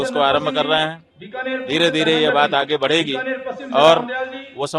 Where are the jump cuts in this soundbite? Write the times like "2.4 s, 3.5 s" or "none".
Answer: none